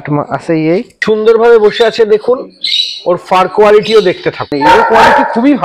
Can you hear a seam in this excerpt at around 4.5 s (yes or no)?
yes